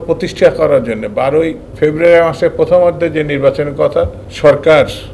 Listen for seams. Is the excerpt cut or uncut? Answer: cut